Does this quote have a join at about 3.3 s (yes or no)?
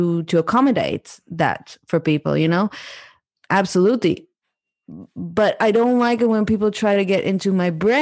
yes